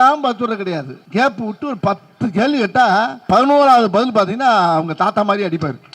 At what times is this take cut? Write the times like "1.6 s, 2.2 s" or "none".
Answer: 1.0 s, 3.2 s